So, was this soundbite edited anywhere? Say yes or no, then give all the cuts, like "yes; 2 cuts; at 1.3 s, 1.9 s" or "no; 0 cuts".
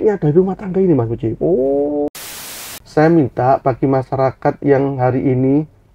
yes; 1 cut; at 2.2 s